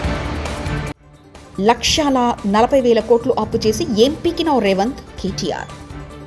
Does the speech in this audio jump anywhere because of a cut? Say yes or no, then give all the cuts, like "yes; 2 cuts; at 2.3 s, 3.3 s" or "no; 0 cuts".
yes; 1 cut; at 0.9 s